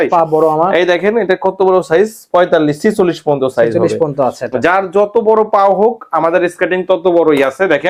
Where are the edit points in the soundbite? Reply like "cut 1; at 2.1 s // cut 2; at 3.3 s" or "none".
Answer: none